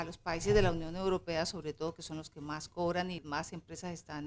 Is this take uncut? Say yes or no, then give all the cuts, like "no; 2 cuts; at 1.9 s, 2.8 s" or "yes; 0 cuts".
no; 1 cut; at 3.2 s